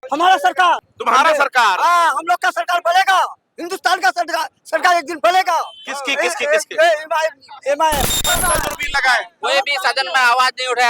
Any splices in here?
yes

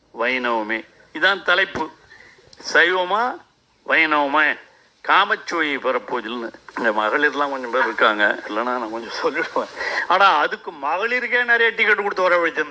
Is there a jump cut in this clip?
yes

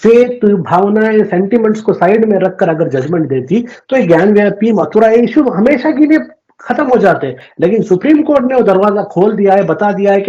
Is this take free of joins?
yes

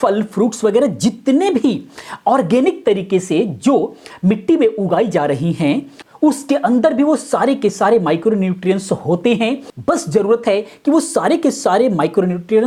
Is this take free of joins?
yes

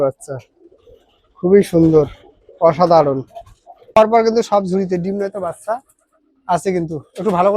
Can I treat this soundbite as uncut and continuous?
no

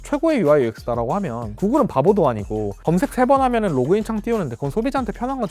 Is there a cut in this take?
no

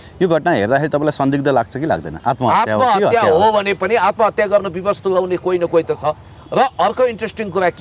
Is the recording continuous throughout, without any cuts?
no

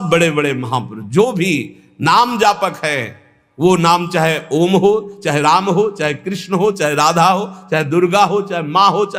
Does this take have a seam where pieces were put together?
no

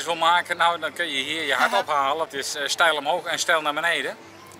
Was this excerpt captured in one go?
no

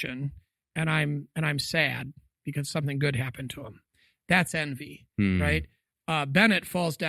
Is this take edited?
no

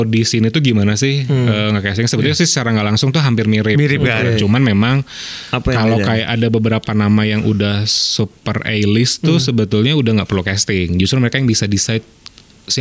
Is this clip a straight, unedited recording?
yes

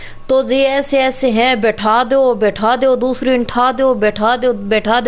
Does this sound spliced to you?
no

